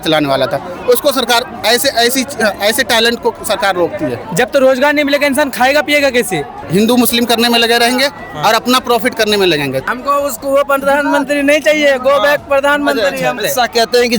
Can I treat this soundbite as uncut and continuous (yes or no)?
no